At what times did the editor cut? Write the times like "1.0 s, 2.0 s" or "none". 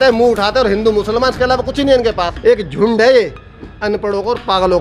2.3 s